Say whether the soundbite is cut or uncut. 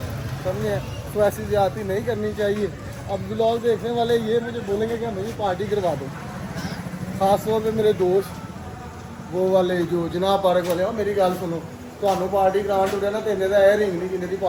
uncut